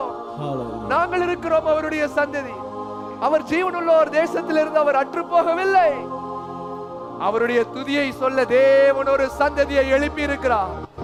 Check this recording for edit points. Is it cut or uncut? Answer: uncut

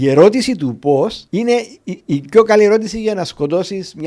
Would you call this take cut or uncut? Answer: cut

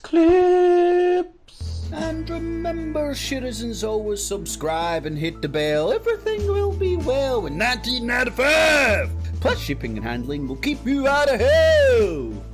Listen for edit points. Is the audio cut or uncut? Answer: cut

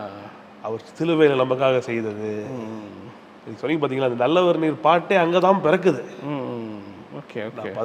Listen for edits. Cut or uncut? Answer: uncut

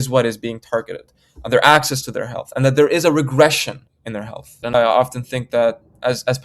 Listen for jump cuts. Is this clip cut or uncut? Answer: cut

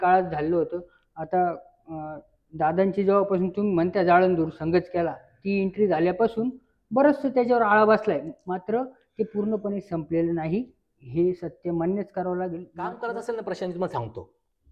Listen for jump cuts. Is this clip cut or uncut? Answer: cut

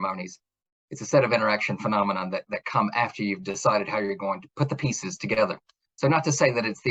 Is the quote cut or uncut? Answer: uncut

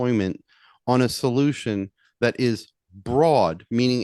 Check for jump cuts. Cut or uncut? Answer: uncut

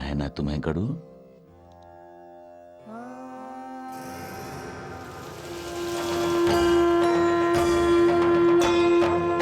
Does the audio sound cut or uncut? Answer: uncut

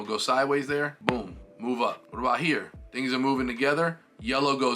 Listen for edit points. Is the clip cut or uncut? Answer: cut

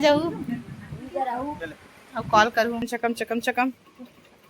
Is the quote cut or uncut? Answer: cut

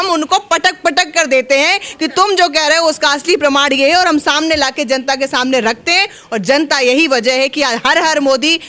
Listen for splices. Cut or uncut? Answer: uncut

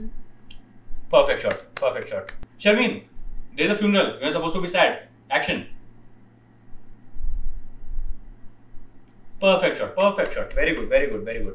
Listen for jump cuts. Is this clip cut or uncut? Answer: uncut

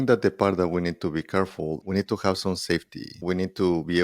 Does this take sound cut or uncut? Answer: cut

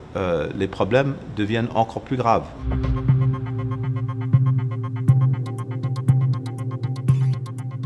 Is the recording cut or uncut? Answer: cut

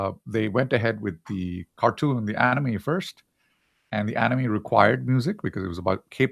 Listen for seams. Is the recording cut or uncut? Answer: uncut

